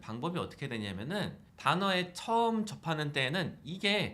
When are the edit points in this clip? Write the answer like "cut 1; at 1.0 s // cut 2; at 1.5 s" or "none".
cut 1; at 1.5 s